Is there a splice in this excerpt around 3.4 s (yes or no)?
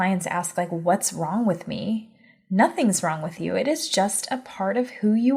yes